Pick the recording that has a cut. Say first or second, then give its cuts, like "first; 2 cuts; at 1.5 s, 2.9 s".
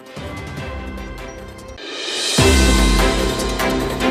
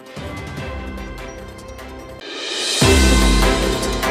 second; 1 cut; at 1.7 s